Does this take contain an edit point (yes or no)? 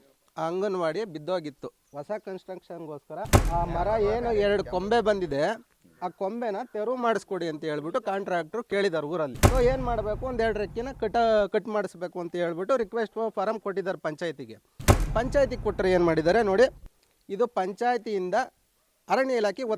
yes